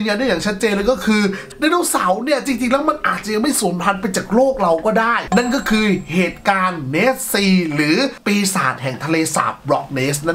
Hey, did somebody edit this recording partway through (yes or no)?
yes